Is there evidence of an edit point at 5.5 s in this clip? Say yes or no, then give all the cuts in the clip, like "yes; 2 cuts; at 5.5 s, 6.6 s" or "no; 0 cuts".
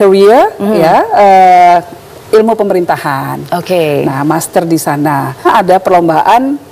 yes; 1 cut; at 5.5 s